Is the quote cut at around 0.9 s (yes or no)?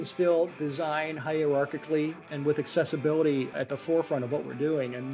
no